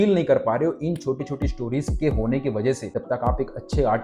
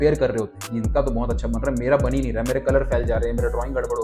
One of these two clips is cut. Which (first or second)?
first